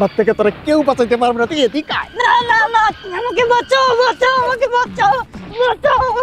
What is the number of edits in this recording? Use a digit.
0